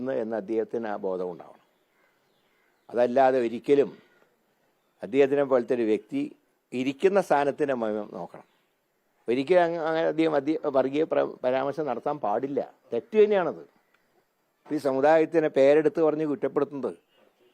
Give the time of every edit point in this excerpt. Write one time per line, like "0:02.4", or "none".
none